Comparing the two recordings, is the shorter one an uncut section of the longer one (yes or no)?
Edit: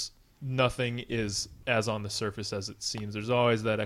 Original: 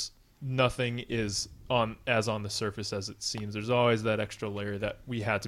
no